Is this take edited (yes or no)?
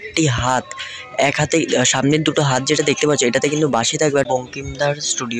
yes